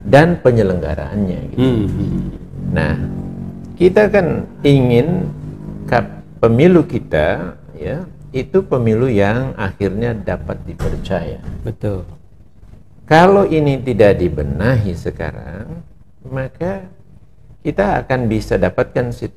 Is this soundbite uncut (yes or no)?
yes